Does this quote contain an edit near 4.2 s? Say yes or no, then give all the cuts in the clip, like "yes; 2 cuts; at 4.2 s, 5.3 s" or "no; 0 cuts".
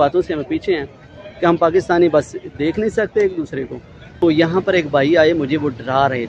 yes; 1 cut; at 4.2 s